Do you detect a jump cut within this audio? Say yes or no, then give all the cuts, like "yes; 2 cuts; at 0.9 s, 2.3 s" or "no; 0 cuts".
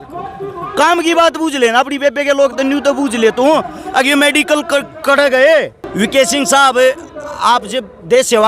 yes; 1 cut; at 5.8 s